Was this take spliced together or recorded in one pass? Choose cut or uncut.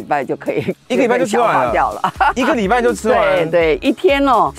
uncut